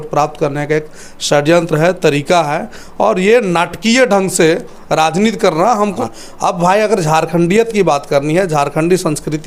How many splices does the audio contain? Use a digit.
1